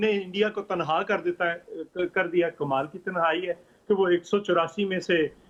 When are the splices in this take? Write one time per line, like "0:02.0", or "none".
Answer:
none